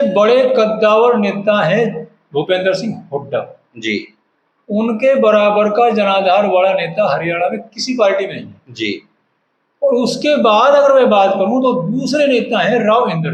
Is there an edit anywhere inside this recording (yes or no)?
no